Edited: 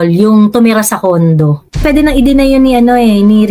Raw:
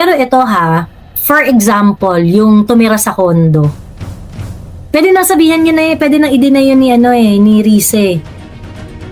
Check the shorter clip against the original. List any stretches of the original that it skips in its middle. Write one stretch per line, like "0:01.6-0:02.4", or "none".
0:04.0-0:06.0

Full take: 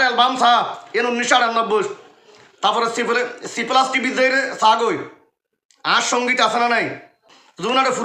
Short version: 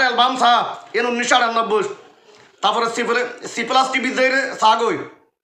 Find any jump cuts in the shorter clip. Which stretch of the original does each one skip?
none

